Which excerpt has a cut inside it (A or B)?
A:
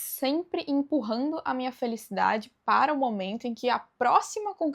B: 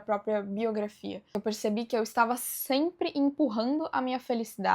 B